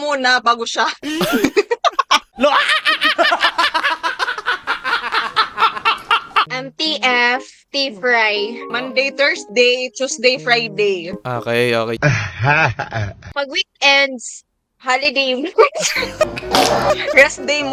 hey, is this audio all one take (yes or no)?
yes